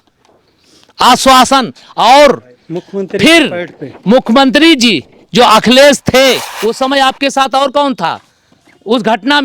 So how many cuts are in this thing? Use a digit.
1